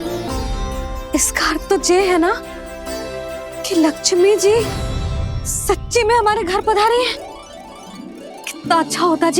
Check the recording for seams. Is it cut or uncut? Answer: cut